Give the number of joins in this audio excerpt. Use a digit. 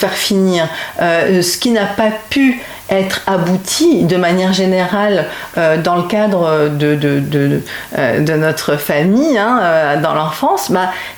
0